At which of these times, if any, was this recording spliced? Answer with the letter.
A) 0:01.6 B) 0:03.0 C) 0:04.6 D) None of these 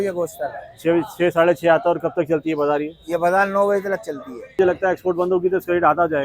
C